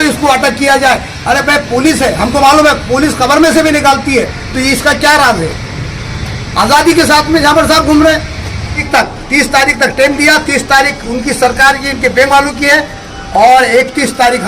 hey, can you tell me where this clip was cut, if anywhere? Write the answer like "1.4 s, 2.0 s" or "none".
8.8 s